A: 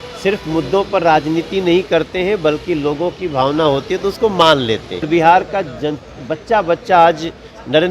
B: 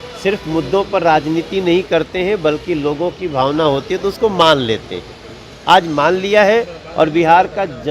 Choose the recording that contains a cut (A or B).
A